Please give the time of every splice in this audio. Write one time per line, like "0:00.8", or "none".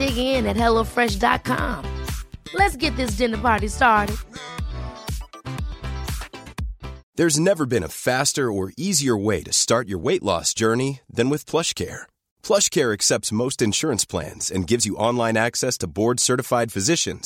0:07.0